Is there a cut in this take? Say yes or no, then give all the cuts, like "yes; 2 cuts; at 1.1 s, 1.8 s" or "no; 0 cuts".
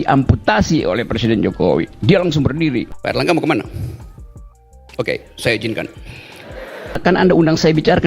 yes; 2 cuts; at 3.0 s, 7.0 s